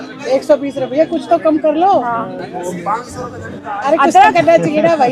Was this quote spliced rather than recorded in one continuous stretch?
no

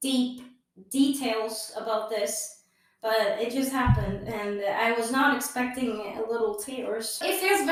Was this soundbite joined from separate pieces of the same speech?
no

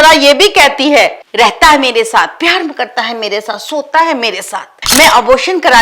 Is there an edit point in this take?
yes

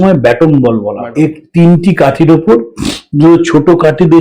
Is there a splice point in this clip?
yes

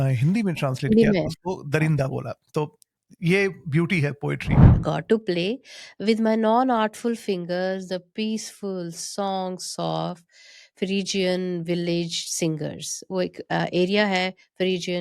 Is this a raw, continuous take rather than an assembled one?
no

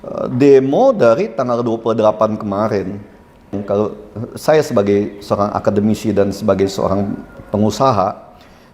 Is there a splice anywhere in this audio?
yes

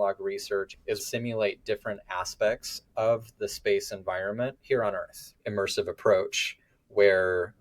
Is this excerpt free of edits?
no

